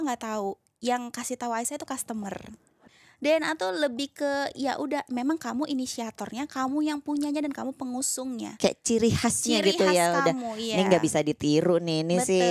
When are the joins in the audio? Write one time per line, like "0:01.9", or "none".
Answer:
0:02.8